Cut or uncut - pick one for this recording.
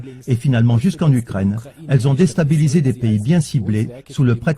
cut